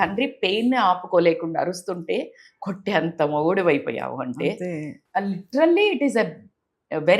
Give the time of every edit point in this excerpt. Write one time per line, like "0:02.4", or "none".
0:04.9